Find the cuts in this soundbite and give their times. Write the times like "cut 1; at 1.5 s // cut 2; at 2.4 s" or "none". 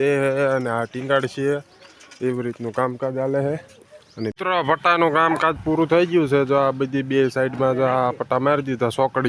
cut 1; at 4.3 s